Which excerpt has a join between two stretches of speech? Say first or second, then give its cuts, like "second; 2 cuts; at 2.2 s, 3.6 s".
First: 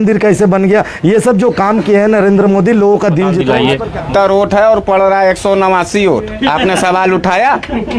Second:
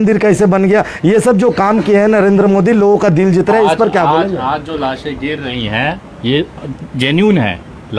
first; 1 cut; at 4.0 s